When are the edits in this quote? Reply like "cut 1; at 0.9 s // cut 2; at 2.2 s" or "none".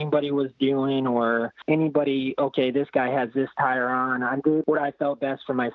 cut 1; at 1.6 s // cut 2; at 4.6 s